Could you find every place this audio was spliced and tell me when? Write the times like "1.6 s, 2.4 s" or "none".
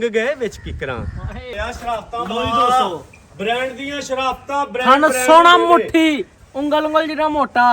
1.5 s